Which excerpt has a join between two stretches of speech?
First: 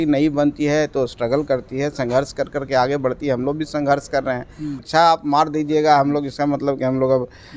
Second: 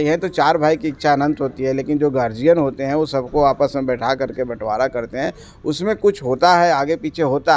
first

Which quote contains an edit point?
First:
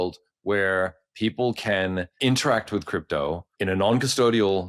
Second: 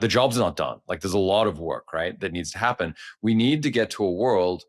first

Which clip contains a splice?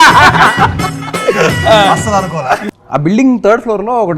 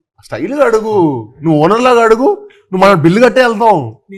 first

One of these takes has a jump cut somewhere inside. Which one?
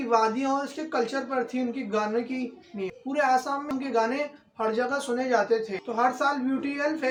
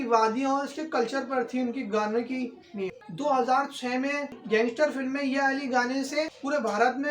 second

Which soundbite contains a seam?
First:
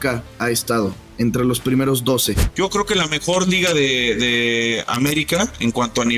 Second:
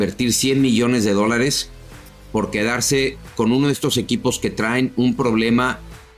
first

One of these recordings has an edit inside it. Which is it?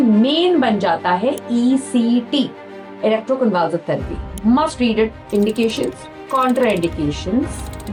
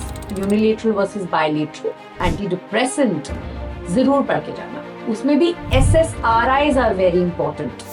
second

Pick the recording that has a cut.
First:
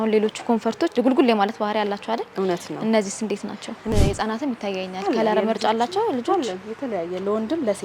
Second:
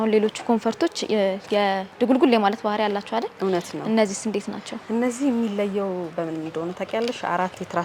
first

